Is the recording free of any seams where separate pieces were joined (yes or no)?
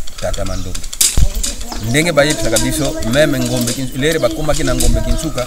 no